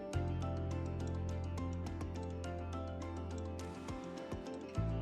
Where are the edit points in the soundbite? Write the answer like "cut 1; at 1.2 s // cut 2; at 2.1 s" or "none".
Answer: none